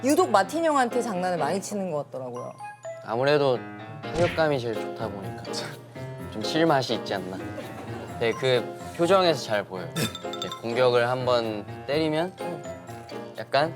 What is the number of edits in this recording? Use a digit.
1